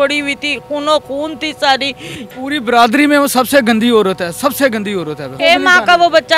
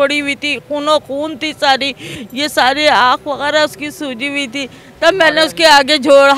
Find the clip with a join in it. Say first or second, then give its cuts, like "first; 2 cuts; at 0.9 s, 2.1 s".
first; 2 cuts; at 2.3 s, 5.2 s